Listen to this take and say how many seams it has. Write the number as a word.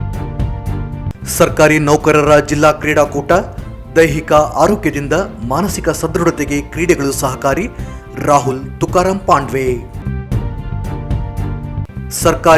one